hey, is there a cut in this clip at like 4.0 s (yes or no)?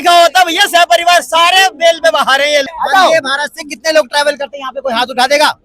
no